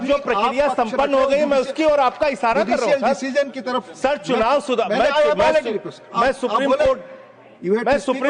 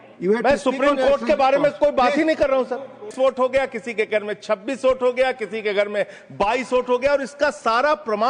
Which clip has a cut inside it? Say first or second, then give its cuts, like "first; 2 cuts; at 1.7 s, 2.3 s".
second; 1 cut; at 3.1 s